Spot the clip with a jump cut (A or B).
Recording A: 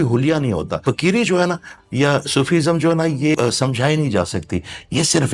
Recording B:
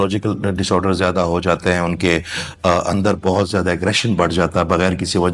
A